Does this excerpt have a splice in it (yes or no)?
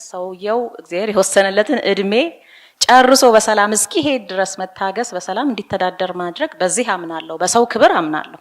no